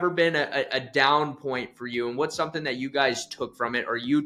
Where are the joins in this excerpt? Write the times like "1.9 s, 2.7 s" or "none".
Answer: none